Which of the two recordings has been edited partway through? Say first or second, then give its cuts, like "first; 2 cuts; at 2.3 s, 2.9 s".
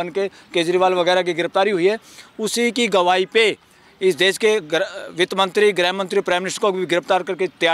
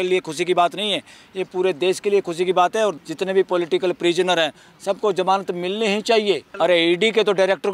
second; 2 cuts; at 3.0 s, 6.5 s